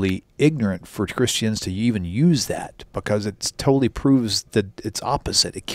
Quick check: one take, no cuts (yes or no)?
yes